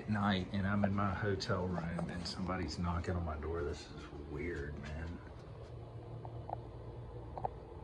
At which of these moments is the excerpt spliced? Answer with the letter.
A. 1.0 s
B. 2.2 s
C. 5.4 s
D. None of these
C